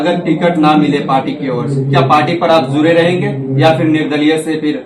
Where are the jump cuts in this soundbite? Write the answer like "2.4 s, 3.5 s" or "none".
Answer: none